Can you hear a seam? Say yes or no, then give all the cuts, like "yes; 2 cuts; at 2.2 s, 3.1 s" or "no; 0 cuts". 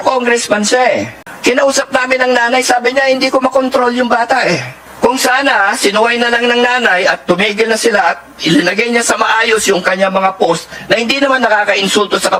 no; 0 cuts